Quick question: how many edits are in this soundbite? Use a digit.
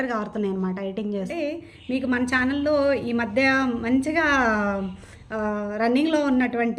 1